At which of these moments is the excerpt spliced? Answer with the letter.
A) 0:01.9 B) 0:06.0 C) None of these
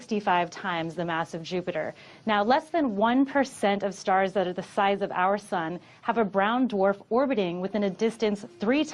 C